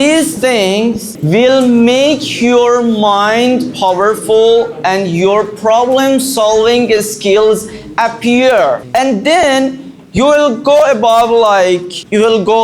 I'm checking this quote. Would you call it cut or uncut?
uncut